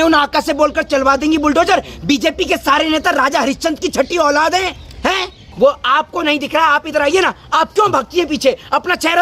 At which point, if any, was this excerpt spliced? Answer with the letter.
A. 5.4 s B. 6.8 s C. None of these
A